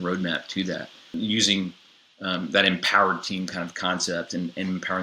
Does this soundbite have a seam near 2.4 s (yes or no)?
no